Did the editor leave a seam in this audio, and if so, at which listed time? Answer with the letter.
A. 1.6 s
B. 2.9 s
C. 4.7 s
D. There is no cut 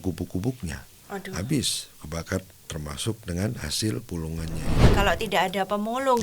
C